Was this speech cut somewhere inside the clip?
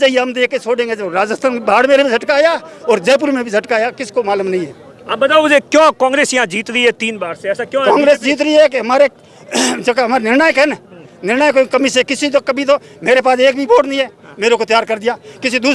no; 0 cuts

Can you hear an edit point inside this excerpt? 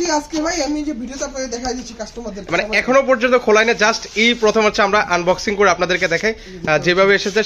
no; 0 cuts

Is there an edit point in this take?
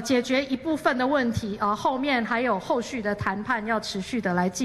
no; 0 cuts

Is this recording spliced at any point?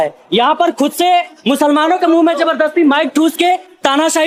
no; 0 cuts

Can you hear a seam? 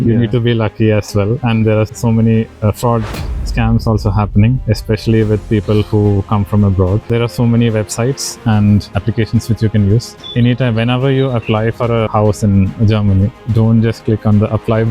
yes; 6 cuts; at 1.9 s, 4.6 s, 7.1 s, 8.9 s, 10.2 s, 12.1 s

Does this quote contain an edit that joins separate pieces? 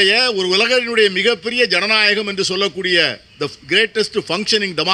no; 0 cuts

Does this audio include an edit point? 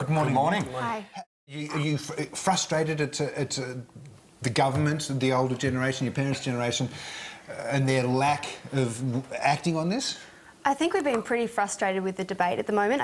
yes; 1 cut; at 1.1 s

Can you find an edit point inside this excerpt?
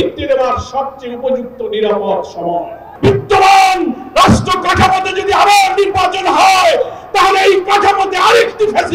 yes; 1 cut; at 2.8 s

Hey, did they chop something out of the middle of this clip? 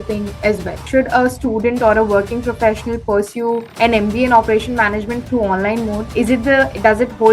yes; 3 cuts; at 0.8 s, 3.7 s, 6.0 s

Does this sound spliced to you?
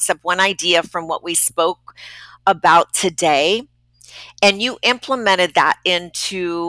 no; 0 cuts

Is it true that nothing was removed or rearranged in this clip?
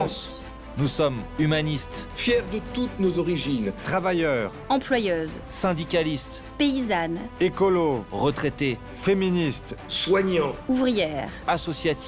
yes; 0 cuts

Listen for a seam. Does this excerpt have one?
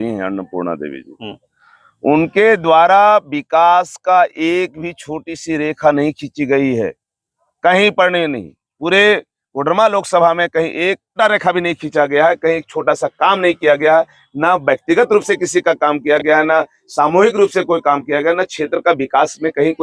yes; 1 cut; at 11.2 s

